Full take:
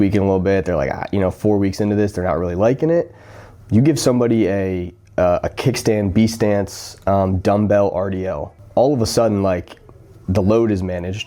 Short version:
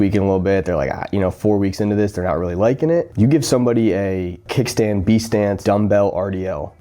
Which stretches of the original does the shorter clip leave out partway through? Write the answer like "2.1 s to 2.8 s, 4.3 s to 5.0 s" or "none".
3.1 s to 3.6 s, 5.0 s to 5.5 s, 6.7 s to 7.4 s